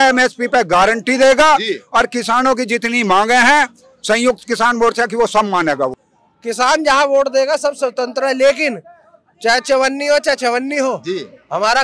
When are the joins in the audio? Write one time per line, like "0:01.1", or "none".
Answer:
0:06.0

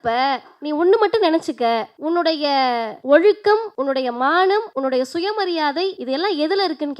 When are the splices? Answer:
0:01.9
0:02.9
0:03.7
0:04.7
0:06.0

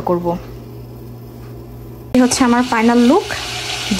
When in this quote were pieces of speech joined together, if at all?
0:02.1

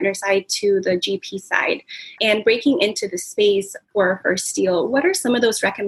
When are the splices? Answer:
none

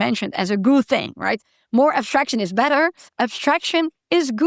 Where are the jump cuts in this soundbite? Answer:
0:03.0

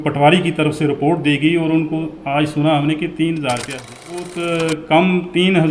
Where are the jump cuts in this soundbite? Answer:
0:04.3

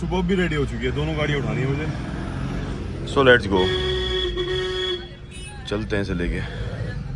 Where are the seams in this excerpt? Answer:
none

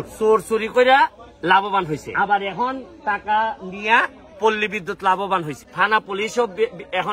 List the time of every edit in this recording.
0:05.7

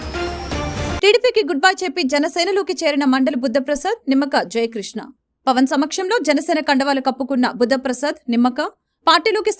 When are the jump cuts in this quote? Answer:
none

